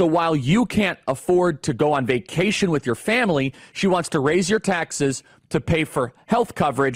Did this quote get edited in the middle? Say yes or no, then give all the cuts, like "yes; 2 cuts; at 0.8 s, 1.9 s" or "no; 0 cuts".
no; 0 cuts